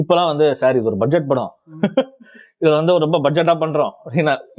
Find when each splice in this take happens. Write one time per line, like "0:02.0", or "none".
none